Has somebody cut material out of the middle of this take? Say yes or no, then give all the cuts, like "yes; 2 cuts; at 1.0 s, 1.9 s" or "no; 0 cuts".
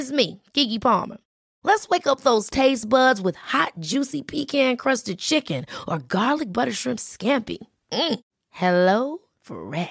no; 0 cuts